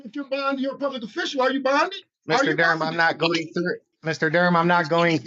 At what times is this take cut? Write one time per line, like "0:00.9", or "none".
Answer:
0:02.1
0:03.9